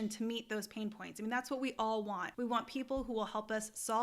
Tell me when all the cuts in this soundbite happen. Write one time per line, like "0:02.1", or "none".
0:02.3